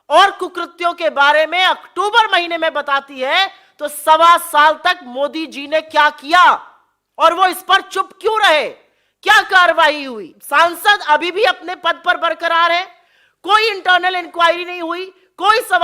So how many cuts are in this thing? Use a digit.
1